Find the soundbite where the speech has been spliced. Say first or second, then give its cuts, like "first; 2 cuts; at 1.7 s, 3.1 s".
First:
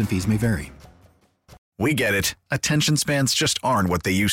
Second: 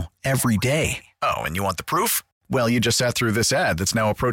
first; 1 cut; at 1.6 s